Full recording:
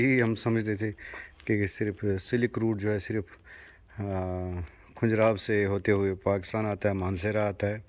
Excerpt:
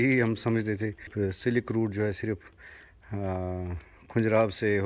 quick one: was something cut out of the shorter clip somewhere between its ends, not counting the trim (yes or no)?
yes